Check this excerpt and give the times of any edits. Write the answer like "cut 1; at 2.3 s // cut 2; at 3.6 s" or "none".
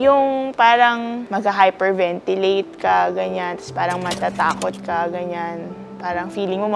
cut 1; at 1.2 s